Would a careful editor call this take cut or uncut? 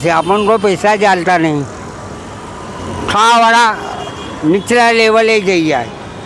uncut